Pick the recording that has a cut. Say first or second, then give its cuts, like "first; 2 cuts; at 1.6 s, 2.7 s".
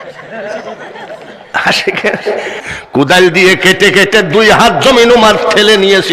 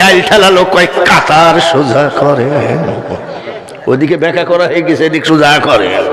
first; 1 cut; at 2.6 s